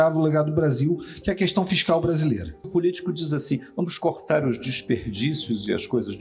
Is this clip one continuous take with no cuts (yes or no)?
no